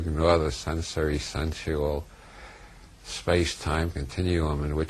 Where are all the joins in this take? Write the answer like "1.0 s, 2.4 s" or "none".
none